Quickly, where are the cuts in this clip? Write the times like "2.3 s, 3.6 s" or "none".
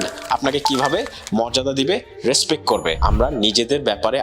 3.0 s